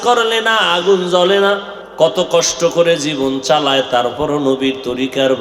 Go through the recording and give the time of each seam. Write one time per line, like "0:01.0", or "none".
0:01.8